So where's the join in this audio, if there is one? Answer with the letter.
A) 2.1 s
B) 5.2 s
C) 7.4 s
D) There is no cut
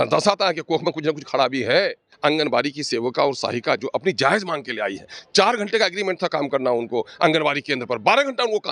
A